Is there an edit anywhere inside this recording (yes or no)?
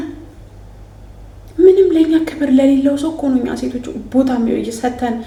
no